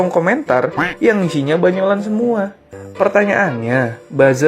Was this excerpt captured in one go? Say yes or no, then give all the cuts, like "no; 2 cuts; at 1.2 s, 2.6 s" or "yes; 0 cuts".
no; 1 cut; at 2.8 s